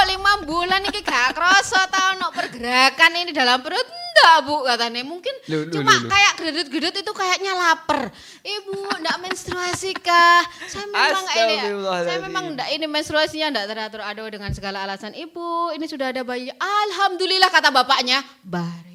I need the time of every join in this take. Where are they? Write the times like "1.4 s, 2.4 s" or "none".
none